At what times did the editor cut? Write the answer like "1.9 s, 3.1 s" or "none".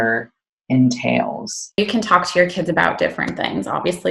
1.8 s